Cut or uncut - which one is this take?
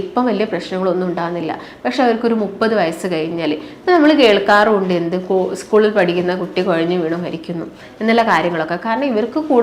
uncut